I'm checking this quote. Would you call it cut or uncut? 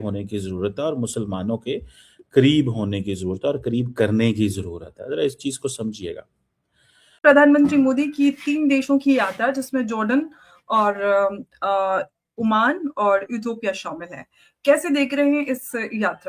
cut